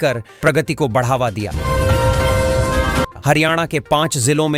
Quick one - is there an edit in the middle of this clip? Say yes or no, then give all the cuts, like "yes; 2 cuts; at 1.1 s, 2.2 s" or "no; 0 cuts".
no; 0 cuts